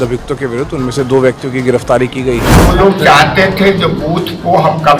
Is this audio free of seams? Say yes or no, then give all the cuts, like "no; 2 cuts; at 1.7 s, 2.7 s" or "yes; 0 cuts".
no; 1 cut; at 2.5 s